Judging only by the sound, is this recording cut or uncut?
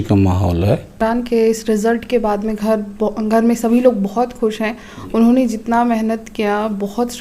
cut